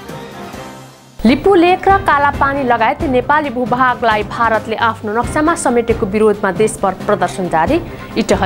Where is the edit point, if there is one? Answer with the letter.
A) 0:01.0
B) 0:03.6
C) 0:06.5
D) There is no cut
A